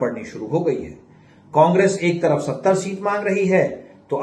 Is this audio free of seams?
yes; 0 cuts

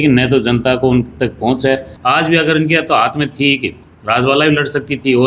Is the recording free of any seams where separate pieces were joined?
no; 1 cut; at 1.9 s

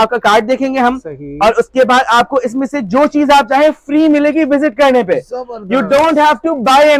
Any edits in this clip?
no; 0 cuts

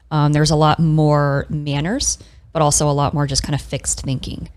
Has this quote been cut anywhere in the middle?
no; 0 cuts

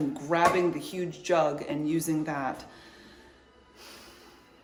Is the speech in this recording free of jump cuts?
yes; 0 cuts

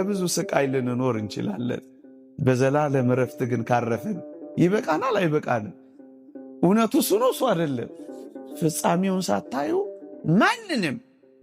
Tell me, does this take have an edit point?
no; 0 cuts

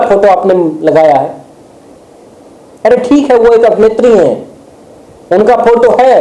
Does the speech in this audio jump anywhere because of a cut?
no; 0 cuts

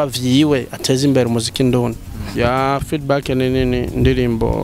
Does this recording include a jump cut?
yes; 1 cut; at 2.2 s

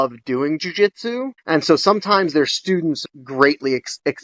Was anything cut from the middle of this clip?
yes; 1 cut; at 3.0 s

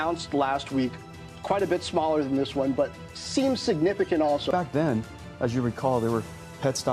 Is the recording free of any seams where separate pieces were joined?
yes; 0 cuts

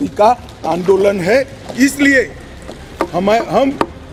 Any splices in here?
no; 0 cuts

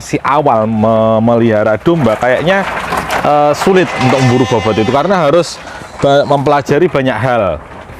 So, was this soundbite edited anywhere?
no; 0 cuts

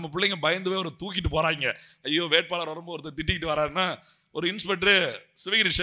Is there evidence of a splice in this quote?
no; 0 cuts

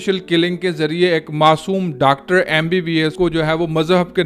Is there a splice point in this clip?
yes; 1 cut; at 3.1 s

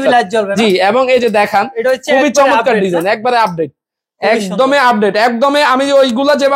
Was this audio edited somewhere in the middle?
no; 0 cuts

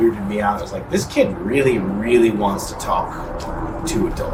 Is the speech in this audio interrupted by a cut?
no; 0 cuts

